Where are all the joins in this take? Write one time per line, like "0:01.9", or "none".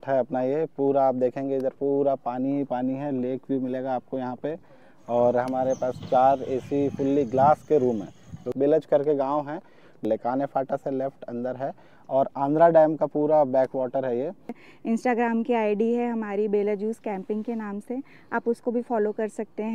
0:08.4
0:10.0
0:14.7